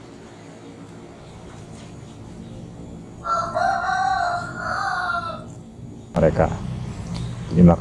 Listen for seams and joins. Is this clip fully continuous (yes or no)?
no